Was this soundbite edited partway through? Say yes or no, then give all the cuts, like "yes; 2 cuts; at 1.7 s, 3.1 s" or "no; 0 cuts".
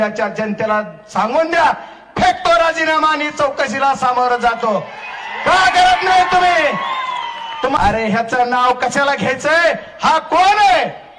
yes; 1 cut; at 7.7 s